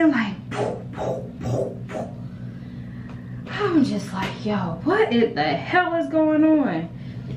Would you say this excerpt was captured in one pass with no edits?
yes; 0 cuts

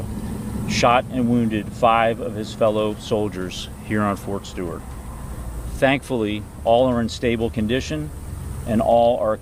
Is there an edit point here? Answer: no; 0 cuts

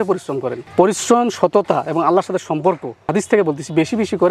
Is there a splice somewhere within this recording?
yes; 1 cut; at 3.1 s

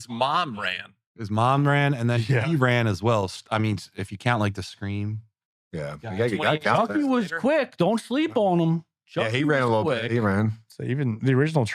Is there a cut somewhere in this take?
no; 0 cuts

